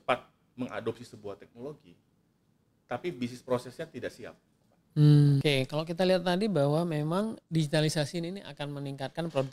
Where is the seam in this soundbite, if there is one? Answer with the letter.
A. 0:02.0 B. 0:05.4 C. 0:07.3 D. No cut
B